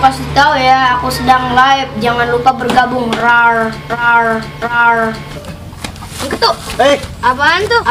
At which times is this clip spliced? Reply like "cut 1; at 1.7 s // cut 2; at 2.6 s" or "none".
cut 1; at 5.3 s